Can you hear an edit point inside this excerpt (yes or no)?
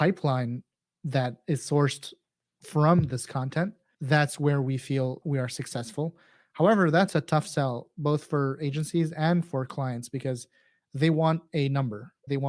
yes